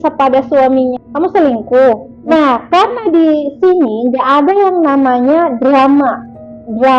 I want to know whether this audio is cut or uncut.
cut